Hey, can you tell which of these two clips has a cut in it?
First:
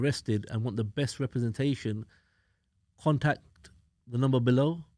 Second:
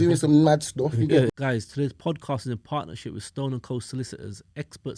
second; 1 cut; at 1.3 s

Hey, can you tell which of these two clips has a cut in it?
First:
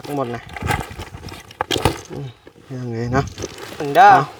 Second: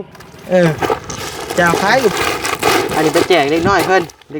second; 1 cut; at 2.1 s

